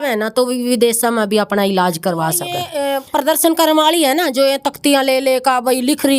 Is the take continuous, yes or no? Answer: no